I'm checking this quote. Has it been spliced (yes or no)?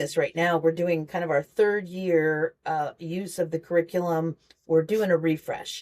no